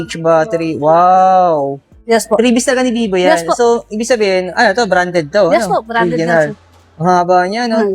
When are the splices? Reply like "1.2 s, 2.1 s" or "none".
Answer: 2.0 s